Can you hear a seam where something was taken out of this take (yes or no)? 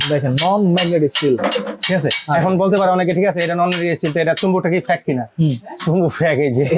no